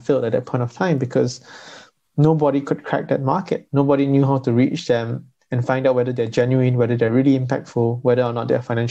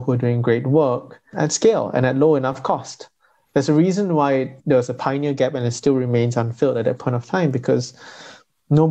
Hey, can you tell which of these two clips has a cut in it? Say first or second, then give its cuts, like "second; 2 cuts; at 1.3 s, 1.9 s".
second; 2 cuts; at 1.3 s, 4.5 s